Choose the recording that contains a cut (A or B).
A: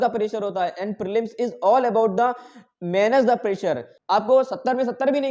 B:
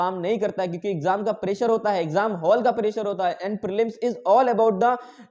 A